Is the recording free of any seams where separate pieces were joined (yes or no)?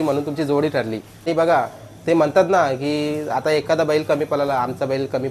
no